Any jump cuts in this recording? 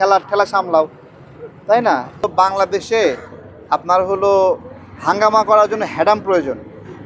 yes; 1 cut; at 2.2 s

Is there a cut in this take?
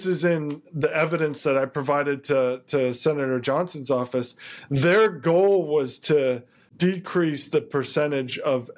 yes; 1 cut; at 6.7 s

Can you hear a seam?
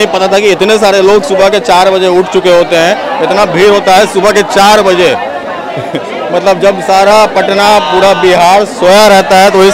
no; 0 cuts

